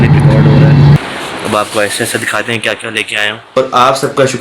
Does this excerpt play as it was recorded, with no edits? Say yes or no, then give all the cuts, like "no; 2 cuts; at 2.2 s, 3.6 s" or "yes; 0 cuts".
no; 2 cuts; at 1.0 s, 3.4 s